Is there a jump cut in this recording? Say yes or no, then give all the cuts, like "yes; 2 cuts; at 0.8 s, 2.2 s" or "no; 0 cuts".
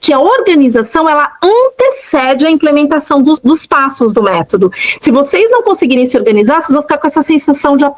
yes; 1 cut; at 3.4 s